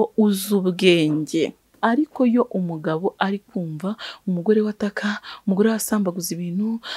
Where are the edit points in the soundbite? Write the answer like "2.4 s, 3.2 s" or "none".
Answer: 1.7 s